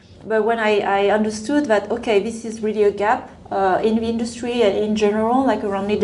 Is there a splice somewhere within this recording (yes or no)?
no